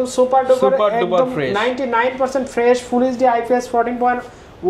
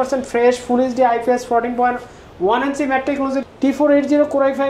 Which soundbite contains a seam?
second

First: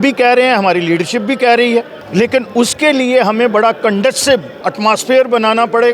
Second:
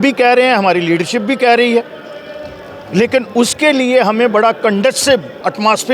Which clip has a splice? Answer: first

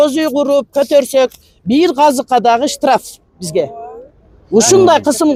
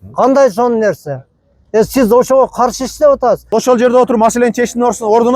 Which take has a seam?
second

